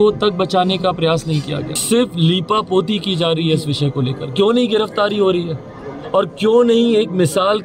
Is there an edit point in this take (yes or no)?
yes